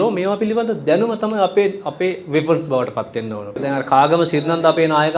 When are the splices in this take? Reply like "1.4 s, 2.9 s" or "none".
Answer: 3.5 s